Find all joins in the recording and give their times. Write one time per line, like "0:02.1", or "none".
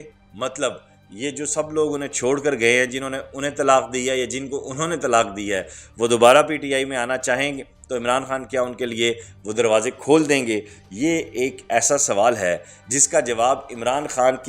none

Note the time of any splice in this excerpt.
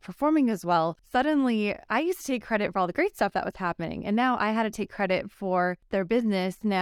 0:01.0
0:05.8

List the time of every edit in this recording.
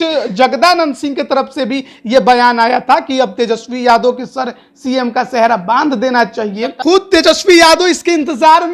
0:06.7

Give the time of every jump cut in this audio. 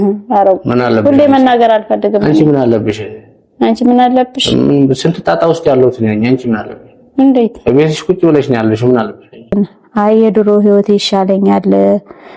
0:09.5

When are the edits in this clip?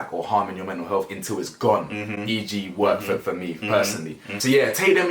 none

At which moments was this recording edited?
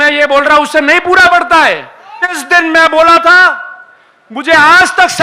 0:02.4

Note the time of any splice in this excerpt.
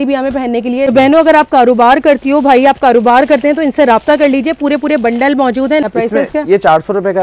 0:00.9
0:05.8

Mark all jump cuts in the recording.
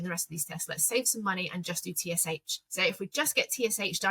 0:02.6

